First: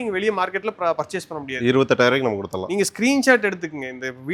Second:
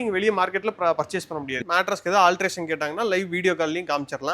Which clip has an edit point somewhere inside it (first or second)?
second